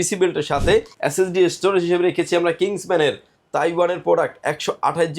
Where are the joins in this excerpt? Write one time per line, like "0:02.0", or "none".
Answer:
0:00.9